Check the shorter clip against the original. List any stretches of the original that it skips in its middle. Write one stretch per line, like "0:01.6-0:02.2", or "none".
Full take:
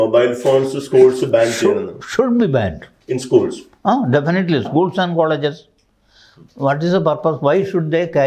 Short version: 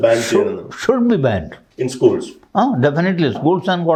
none